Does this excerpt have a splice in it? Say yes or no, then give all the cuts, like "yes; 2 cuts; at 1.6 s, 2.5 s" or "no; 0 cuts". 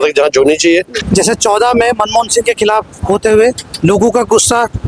yes; 1 cut; at 1.0 s